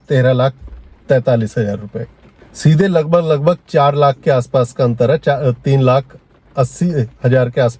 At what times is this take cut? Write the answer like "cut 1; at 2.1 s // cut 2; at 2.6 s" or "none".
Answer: none